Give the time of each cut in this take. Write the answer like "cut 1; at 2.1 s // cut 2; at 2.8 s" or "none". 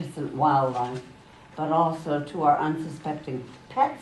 cut 1; at 2.3 s